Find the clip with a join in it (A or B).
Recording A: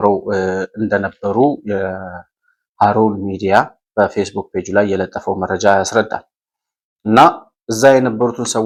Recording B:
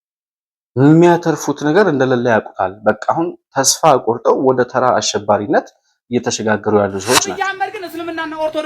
B